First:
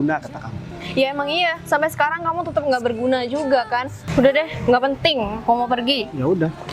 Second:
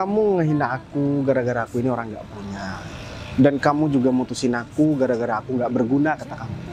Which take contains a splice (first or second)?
first